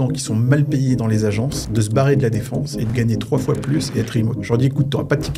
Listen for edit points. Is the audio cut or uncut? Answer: cut